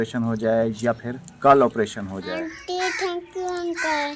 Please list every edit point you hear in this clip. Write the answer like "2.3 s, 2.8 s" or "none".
2.3 s